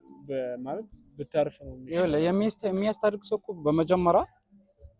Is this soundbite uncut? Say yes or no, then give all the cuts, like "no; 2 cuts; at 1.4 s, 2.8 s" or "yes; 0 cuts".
yes; 0 cuts